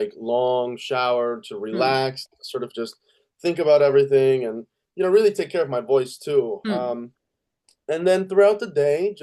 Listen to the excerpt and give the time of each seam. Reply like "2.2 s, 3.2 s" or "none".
none